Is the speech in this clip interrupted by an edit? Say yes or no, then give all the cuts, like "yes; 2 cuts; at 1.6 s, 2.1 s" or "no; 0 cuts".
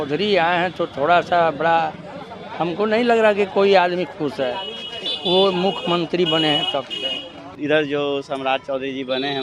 yes; 1 cut; at 7.5 s